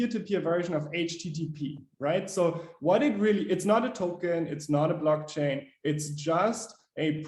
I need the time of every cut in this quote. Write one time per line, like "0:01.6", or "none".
none